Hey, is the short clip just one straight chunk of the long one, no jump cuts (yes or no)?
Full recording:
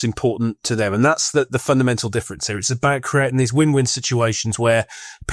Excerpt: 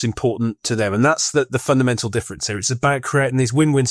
yes